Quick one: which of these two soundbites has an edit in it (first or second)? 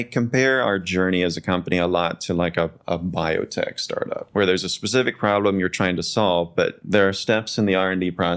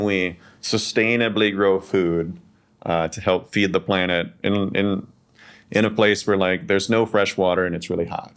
first